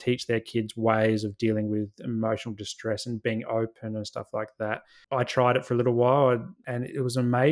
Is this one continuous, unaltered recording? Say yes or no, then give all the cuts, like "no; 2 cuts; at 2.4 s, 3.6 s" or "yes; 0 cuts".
no; 1 cut; at 4.9 s